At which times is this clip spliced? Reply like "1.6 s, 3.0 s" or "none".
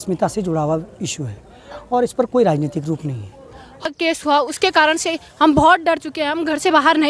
3.8 s